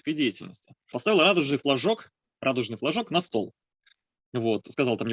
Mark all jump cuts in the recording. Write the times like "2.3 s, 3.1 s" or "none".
1.0 s